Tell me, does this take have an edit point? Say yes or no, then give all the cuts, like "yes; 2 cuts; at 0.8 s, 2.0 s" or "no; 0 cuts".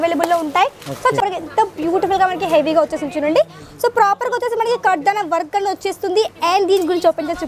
yes; 1 cut; at 1.2 s